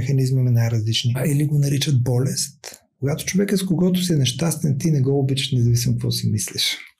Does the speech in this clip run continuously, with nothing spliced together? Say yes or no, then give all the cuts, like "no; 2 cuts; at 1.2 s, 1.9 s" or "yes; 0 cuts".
no; 2 cuts; at 1.2 s, 2.9 s